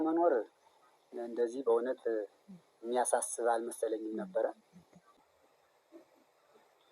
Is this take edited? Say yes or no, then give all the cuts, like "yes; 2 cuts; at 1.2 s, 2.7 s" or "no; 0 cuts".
yes; 1 cut; at 5.2 s